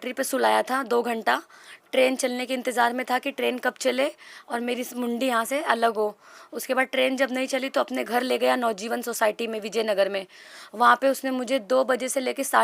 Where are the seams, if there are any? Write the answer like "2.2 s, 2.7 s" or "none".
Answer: none